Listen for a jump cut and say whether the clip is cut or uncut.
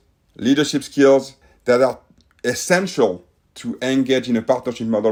uncut